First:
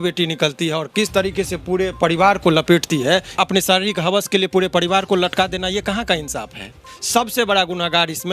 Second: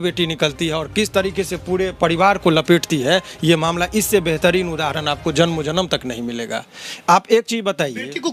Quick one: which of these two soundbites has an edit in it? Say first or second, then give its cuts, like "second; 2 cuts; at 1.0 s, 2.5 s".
first; 2 cuts; at 3.4 s, 6.9 s